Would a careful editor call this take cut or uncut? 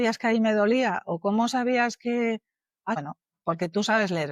cut